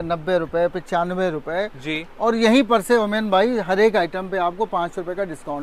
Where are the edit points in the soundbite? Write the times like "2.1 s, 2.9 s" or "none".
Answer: none